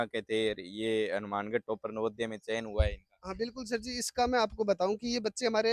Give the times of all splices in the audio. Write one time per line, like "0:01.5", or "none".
none